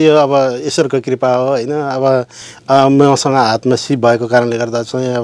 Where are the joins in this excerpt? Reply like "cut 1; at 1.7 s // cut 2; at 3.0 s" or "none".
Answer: cut 1; at 2.4 s